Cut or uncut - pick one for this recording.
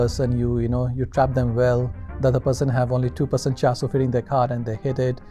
uncut